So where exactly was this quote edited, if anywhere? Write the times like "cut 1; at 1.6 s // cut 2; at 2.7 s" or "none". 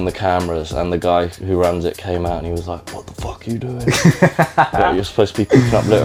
none